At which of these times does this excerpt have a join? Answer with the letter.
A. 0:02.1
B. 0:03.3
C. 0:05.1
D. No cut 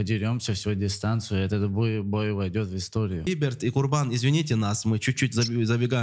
B